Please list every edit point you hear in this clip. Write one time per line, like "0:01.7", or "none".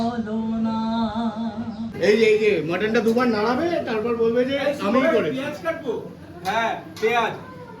0:01.9